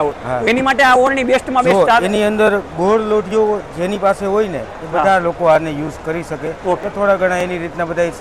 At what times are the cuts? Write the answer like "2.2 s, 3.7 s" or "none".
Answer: none